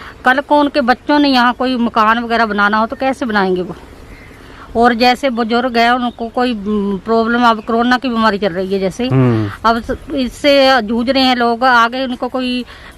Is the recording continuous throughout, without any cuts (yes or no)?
yes